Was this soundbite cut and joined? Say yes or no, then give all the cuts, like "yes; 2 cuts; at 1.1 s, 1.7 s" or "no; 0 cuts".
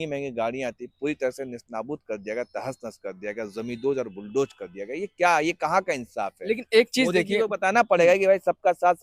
no; 0 cuts